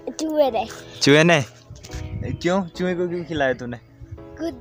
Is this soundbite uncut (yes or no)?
yes